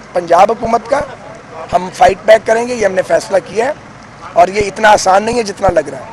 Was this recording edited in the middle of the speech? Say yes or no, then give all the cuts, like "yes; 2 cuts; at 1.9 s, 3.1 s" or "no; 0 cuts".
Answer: no; 0 cuts